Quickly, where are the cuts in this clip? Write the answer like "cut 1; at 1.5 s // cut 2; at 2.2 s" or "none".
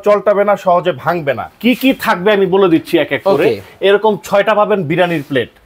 cut 1; at 1.5 s